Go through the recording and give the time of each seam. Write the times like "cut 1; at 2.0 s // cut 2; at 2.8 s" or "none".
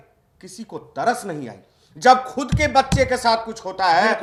none